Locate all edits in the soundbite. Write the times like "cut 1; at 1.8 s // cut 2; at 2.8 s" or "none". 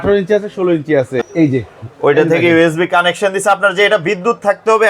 cut 1; at 1.2 s